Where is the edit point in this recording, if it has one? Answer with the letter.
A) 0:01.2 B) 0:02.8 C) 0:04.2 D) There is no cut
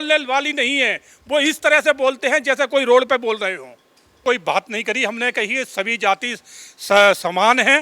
C